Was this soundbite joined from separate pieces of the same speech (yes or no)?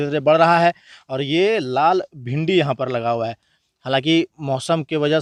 no